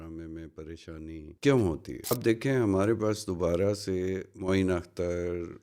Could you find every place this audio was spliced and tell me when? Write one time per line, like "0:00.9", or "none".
0:01.3
0:02.1